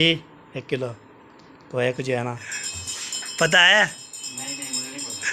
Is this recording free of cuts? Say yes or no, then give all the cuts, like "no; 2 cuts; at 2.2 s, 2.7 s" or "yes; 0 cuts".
no; 1 cut; at 2.4 s